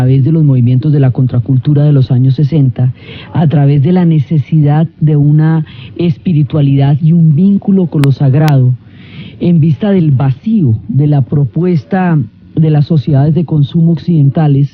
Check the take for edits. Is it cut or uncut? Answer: cut